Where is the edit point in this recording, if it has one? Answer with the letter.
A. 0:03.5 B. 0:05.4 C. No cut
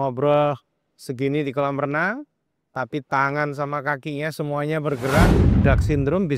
B